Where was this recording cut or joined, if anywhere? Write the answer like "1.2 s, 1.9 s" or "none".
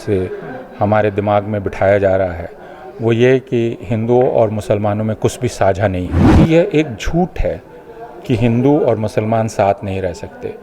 6.2 s

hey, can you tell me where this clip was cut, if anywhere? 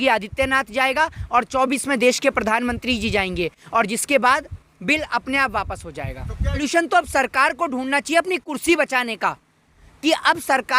6.6 s

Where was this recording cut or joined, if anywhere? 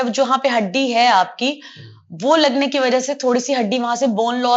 none

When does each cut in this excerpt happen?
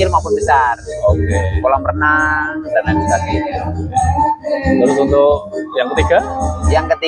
none

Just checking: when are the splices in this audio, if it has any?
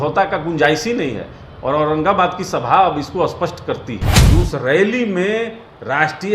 4.1 s

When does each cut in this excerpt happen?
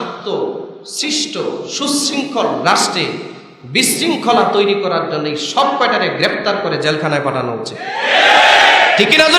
none

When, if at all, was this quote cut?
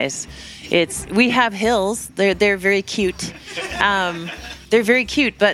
4.5 s

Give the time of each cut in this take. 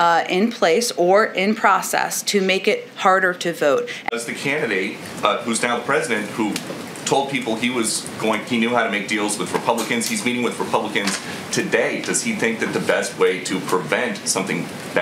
4.1 s

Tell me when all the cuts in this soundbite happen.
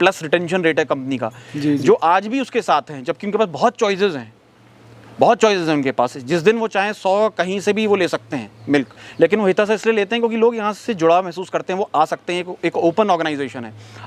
none

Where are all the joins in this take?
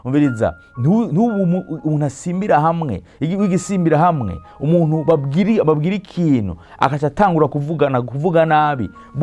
none

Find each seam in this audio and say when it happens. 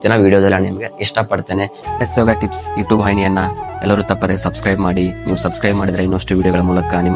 1.9 s

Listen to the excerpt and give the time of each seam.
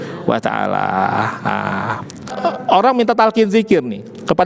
2.3 s

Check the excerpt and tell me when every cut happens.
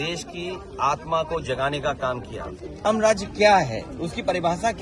2.8 s

